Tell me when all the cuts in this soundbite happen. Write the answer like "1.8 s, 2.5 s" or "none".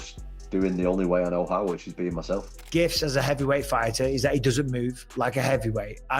2.6 s